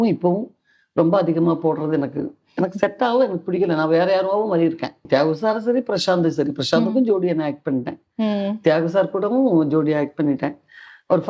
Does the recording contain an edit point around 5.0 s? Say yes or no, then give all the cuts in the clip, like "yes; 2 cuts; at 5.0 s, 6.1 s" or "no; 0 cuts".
yes; 1 cut; at 5.0 s